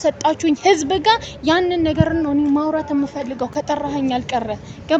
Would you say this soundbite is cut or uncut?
uncut